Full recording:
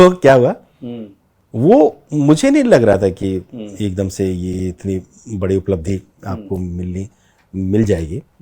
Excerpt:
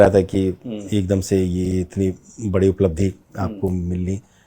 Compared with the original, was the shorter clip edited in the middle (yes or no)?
no